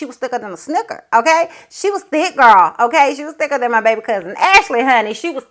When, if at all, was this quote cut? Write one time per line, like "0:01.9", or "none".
none